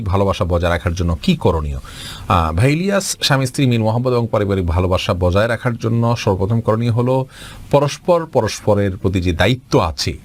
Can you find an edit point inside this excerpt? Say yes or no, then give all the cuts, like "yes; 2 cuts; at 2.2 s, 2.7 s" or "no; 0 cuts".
no; 0 cuts